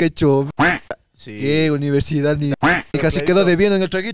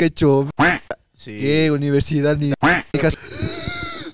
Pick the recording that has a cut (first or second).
second